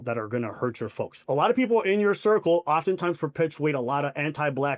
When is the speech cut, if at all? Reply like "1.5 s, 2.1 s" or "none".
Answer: 1.2 s